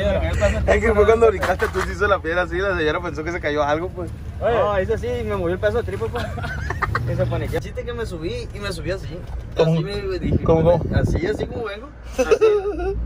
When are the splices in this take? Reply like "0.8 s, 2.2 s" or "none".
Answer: 7.6 s